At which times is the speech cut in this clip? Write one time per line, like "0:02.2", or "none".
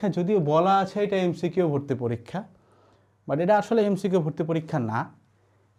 none